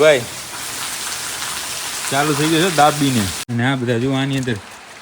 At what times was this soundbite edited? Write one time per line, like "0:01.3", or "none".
0:03.4